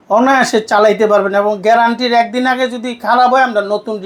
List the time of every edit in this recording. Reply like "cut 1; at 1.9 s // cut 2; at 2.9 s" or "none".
none